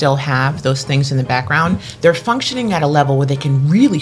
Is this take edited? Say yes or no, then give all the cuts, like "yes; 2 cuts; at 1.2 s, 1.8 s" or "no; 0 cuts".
yes; 1 cut; at 1.9 s